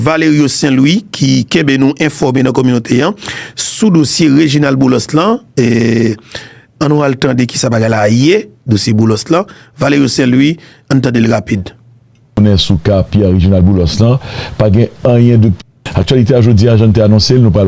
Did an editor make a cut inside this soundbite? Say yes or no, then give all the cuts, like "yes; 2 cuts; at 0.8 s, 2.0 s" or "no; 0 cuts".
no; 0 cuts